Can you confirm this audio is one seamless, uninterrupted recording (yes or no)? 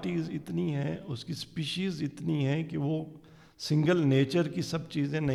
yes